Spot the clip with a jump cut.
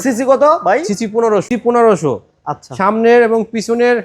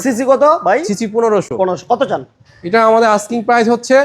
first; 1 cut; at 1.5 s

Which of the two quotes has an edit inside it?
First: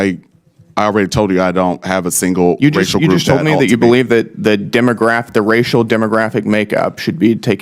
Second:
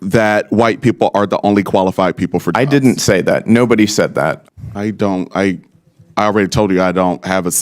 second; 1 cut; at 4.4 s

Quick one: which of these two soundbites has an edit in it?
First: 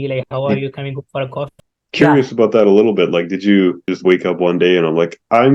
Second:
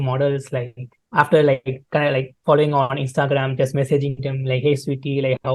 first; 2 cuts; at 1.5 s, 3.9 s

